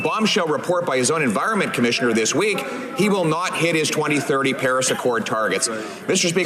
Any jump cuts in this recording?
no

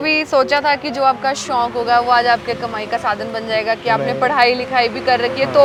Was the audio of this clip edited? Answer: no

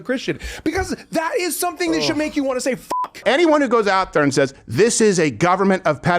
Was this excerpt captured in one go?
no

